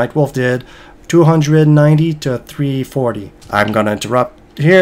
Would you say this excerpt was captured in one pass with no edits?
no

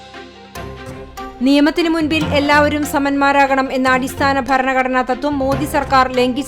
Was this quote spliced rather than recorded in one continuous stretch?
yes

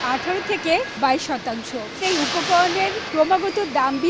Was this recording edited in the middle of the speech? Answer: yes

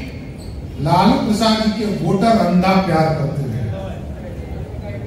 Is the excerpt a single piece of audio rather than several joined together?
yes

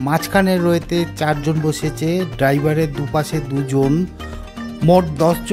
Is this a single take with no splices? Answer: yes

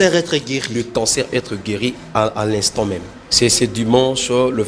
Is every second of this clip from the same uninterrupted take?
no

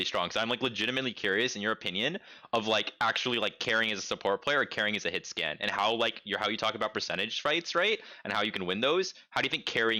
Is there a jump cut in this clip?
no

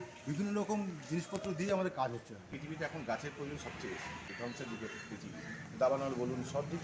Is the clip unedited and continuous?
no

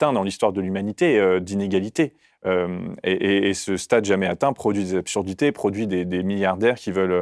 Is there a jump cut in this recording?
no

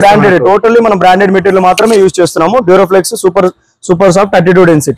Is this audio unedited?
yes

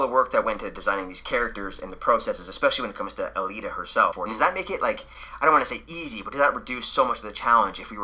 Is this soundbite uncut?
no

